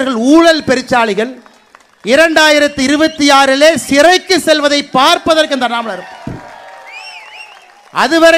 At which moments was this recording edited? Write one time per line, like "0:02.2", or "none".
none